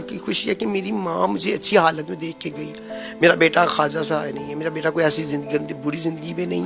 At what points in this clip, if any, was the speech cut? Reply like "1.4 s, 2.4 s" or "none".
none